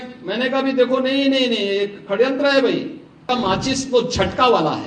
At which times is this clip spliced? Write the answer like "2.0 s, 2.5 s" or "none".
3.2 s